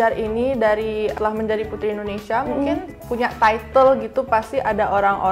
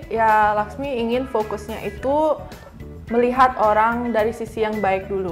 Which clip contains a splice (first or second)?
first